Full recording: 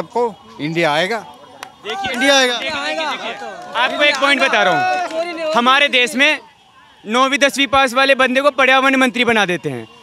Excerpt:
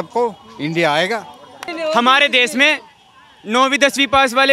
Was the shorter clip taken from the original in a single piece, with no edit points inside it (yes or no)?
no